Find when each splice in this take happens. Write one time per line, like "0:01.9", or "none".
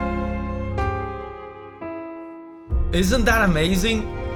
none

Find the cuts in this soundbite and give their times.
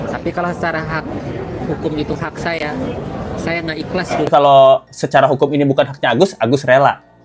0:04.3

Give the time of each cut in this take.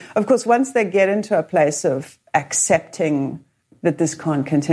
0:03.6

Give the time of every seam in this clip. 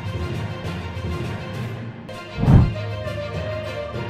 0:01.9

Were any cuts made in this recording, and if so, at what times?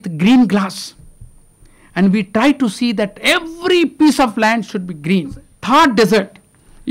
0:05.5

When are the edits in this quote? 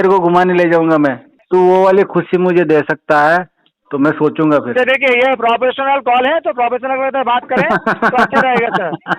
0:01.4

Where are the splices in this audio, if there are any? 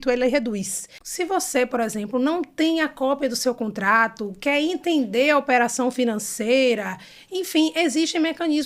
0:01.0

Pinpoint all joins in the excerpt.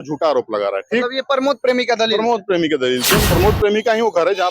0:03.2

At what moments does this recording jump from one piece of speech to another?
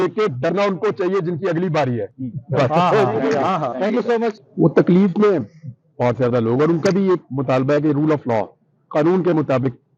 none

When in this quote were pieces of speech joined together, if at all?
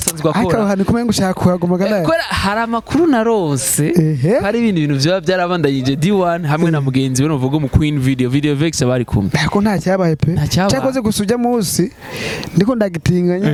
none

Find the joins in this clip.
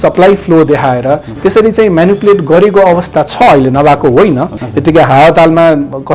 0:04.6

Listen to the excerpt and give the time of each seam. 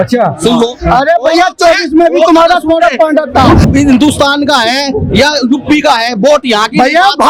0:03.6

